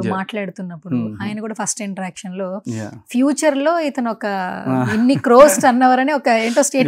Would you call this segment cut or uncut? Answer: uncut